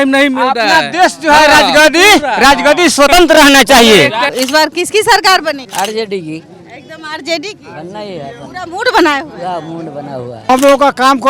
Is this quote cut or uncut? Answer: cut